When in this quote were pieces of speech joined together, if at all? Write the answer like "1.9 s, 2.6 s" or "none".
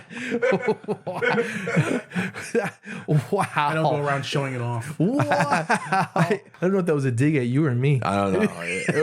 6.5 s